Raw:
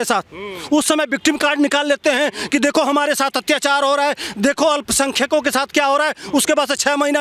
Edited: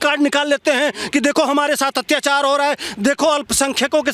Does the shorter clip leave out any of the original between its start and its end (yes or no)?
no